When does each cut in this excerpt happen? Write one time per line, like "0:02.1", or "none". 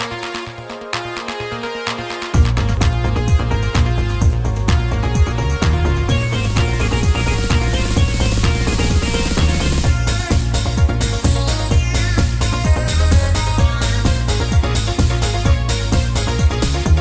none